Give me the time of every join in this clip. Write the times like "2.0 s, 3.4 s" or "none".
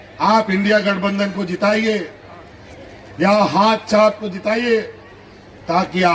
none